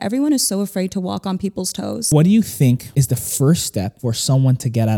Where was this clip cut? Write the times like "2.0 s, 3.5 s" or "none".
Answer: 2.0 s, 2.9 s, 3.9 s